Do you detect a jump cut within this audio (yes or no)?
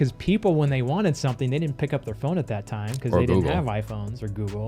no